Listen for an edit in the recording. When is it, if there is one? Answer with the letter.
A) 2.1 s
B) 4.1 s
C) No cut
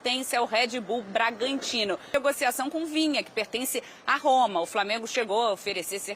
A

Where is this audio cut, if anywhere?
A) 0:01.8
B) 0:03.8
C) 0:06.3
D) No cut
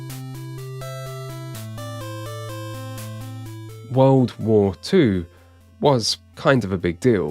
B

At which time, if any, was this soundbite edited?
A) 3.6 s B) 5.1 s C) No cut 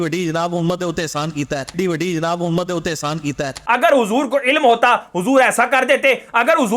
A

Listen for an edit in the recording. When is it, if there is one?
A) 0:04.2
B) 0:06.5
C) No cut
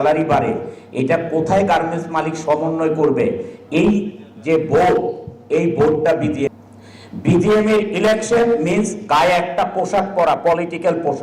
B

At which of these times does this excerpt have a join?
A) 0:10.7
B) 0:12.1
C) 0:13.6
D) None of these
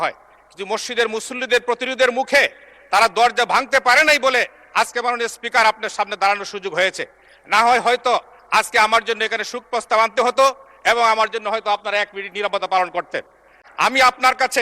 C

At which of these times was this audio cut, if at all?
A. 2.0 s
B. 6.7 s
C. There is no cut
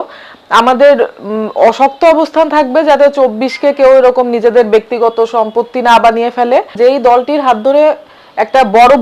B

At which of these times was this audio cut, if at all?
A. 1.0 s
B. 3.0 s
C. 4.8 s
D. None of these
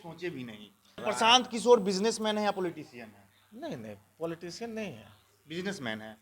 A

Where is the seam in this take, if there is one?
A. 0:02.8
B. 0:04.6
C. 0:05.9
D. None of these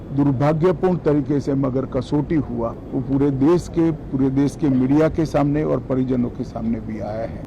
A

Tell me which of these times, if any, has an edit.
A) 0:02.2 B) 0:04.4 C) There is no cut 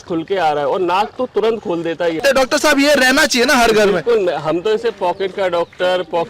A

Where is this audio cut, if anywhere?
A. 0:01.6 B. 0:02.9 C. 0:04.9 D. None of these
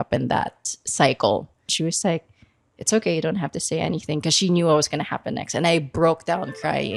A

